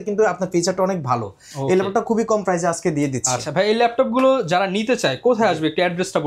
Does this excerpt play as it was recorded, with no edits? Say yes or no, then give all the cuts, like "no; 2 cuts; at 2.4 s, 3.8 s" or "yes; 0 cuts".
yes; 0 cuts